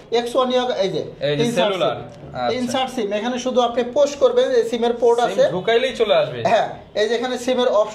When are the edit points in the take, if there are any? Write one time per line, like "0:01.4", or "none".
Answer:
none